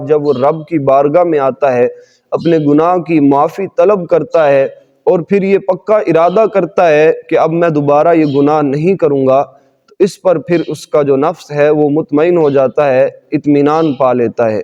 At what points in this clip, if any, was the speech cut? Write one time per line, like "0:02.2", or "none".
none